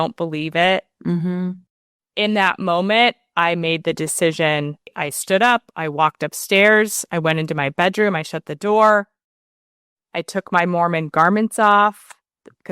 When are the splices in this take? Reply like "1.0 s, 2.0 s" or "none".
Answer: 1.6 s, 4.9 s